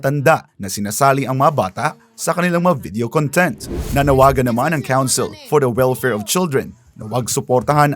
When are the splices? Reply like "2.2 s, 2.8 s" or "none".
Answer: 3.7 s

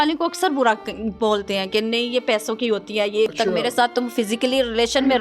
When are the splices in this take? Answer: 3.3 s

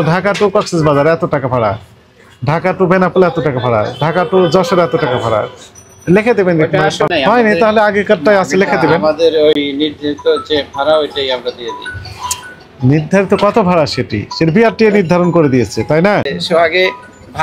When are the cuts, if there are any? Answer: 7.1 s, 16.4 s

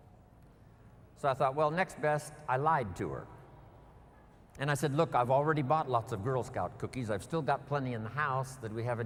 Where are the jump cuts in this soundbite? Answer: none

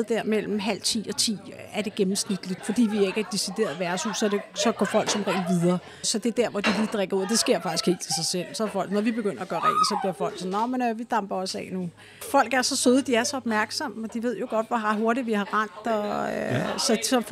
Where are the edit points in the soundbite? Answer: 2.6 s, 12.2 s

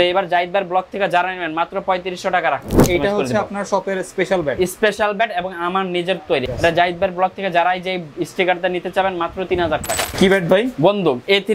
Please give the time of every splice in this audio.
2.8 s, 6.4 s, 10.1 s

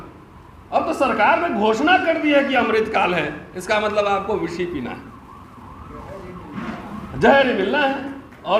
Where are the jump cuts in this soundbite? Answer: none

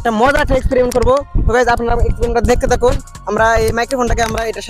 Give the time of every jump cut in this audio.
none

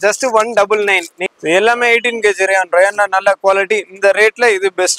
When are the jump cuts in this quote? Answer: 1.3 s

